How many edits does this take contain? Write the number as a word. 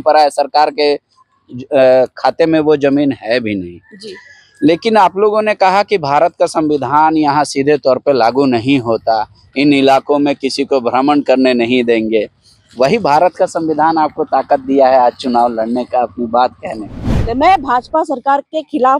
one